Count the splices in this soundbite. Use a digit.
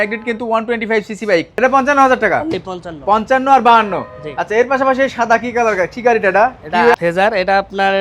2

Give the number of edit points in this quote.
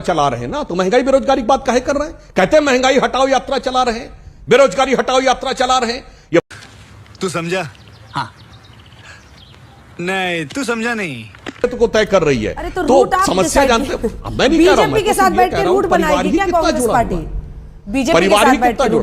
0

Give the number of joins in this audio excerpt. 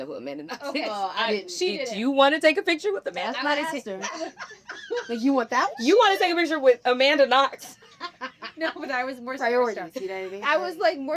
0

